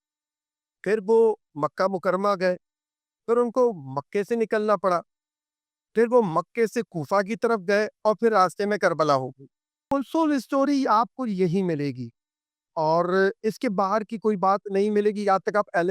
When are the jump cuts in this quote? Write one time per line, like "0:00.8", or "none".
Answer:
0:09.9